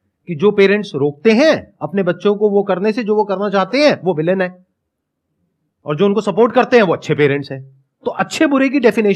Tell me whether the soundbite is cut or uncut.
uncut